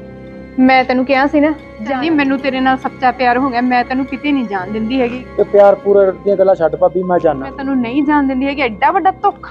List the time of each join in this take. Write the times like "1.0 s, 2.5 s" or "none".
1.8 s, 5.2 s, 7.5 s